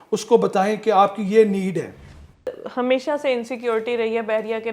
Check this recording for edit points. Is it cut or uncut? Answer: cut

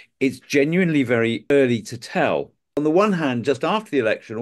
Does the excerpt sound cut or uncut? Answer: cut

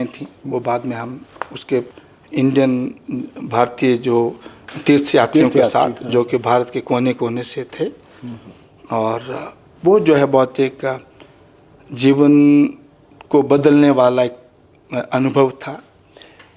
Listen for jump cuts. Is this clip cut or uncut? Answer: cut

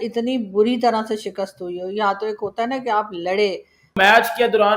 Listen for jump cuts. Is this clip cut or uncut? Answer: cut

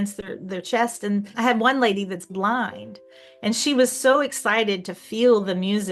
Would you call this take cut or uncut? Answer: cut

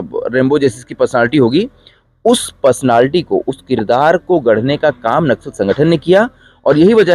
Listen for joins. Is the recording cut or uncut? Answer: uncut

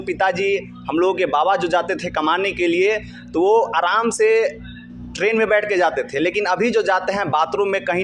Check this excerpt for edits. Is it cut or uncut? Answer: uncut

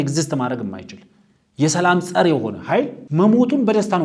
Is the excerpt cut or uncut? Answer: cut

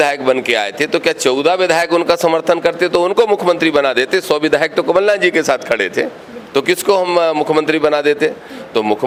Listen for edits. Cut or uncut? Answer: uncut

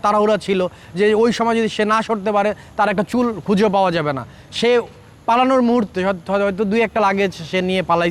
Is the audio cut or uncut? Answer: uncut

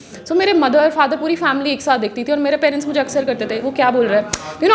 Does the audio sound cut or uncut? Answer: uncut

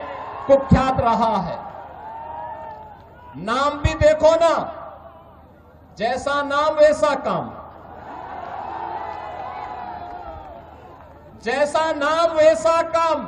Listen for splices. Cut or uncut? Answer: uncut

